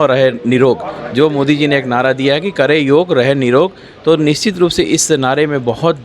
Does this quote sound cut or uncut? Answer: uncut